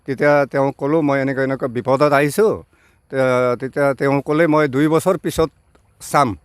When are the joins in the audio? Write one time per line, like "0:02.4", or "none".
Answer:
none